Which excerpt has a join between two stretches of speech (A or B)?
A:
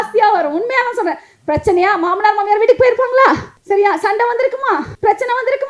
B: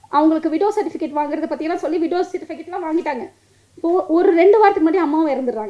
A